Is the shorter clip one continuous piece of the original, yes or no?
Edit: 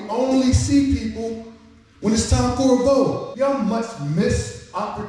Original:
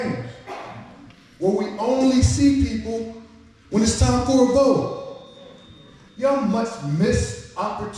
no